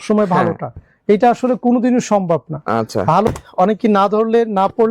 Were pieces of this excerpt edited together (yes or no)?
yes